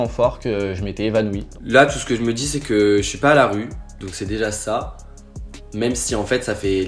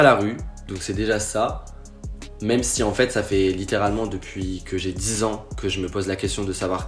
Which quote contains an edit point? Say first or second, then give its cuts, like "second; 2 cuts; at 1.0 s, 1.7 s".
first; 1 cut; at 1.6 s